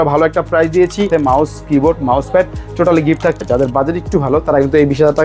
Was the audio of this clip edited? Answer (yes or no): yes